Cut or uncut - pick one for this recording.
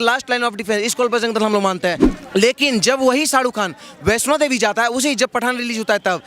cut